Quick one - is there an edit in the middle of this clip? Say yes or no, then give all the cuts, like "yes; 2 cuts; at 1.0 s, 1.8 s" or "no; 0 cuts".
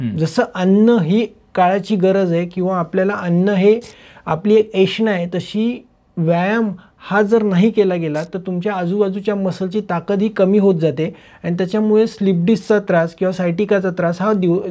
no; 0 cuts